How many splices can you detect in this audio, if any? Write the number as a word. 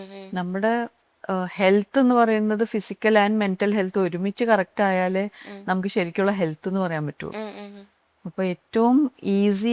zero